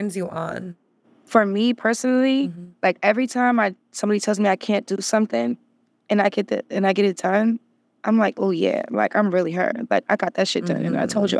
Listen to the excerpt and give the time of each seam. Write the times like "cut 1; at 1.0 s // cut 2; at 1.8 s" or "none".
none